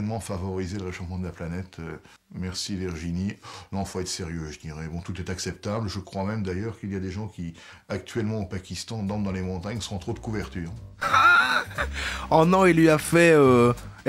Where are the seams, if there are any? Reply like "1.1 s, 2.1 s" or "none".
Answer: 11.1 s